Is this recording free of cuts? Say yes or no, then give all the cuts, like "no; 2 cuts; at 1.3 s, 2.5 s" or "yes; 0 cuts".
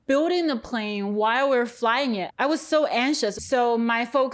no; 1 cut; at 3.3 s